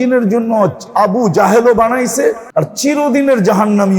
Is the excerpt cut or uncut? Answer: cut